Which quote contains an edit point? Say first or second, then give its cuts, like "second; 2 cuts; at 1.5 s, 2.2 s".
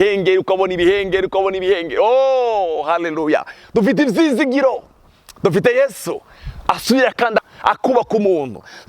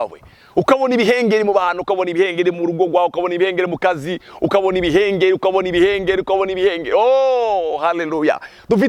first; 1 cut; at 7.5 s